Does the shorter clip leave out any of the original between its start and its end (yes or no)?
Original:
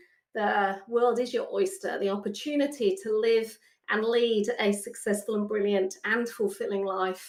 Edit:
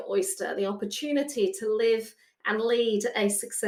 no